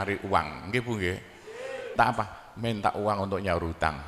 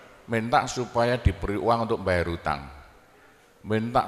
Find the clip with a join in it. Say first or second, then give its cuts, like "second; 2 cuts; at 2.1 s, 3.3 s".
first; 1 cut; at 1.9 s